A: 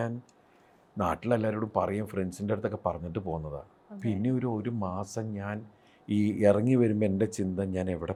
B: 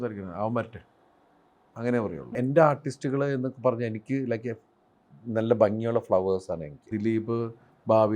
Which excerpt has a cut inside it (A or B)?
B